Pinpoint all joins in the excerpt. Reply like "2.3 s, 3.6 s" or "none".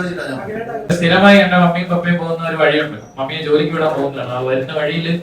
0.9 s